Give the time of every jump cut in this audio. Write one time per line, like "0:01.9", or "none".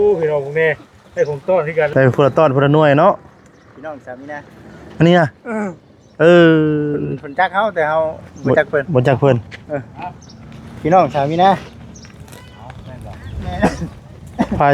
0:01.9